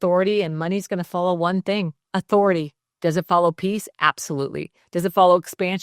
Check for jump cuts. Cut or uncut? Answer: cut